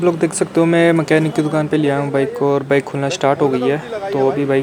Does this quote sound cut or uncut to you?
uncut